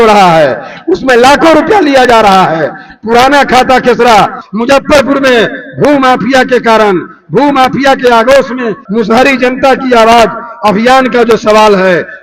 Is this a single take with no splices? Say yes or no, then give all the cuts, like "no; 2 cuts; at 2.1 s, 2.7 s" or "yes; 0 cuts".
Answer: no; 2 cuts; at 4.4 s, 8.8 s